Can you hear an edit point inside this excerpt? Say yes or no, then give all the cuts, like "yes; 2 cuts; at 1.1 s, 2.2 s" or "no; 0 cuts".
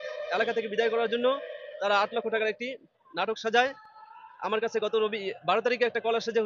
no; 0 cuts